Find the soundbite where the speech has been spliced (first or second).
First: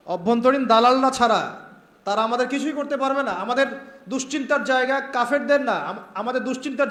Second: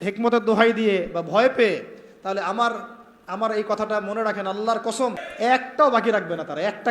second